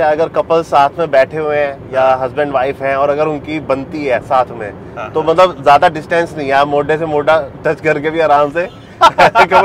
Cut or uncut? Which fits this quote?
uncut